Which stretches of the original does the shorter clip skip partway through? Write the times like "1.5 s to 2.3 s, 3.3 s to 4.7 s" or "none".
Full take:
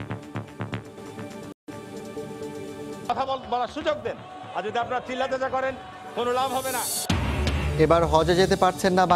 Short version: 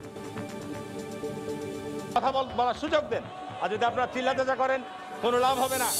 1.8 s to 1.9 s